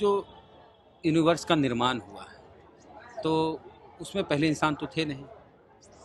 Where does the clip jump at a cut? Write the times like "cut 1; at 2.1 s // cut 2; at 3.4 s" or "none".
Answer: none